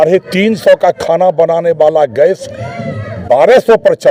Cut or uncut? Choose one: uncut